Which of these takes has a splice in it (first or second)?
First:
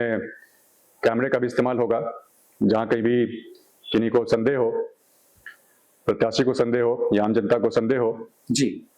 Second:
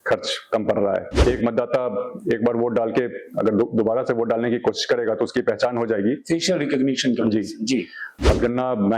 second